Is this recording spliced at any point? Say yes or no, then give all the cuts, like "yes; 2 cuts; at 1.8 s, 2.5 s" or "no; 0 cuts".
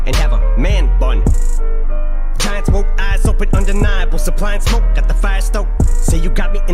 no; 0 cuts